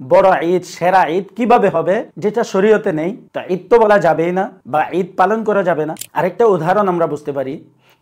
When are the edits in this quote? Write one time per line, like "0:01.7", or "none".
0:06.0